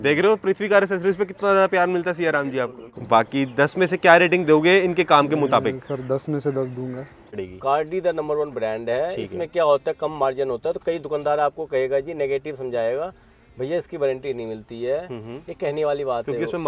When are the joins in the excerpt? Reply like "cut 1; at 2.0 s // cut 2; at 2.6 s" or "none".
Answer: cut 1; at 2.9 s // cut 2; at 7.4 s